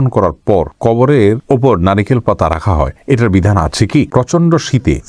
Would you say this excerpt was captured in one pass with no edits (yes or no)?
no